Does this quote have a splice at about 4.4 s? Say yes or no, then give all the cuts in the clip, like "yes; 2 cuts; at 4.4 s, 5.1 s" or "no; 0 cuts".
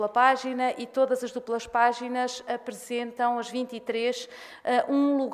no; 1 cut; at 2.8 s